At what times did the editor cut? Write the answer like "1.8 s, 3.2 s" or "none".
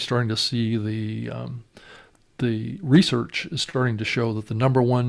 none